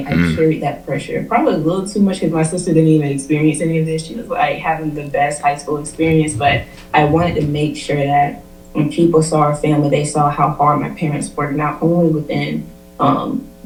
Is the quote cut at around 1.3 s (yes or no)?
no